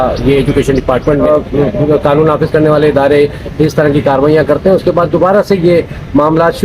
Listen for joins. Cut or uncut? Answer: cut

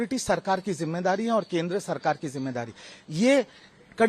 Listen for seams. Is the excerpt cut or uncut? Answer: uncut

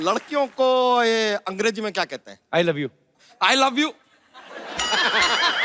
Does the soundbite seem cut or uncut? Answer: uncut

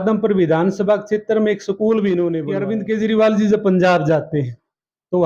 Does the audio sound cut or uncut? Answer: cut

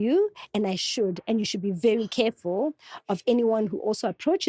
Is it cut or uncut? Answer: uncut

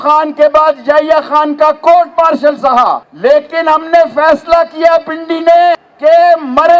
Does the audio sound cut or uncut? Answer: cut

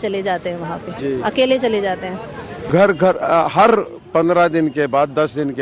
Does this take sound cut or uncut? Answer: cut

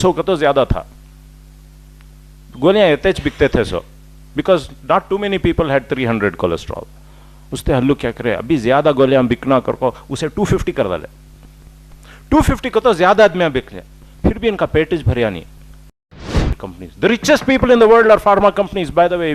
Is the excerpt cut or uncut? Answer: cut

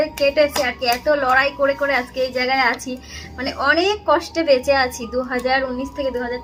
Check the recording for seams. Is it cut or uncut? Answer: uncut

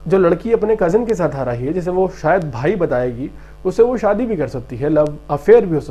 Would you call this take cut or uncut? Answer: uncut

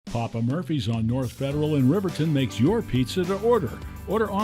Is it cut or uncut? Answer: cut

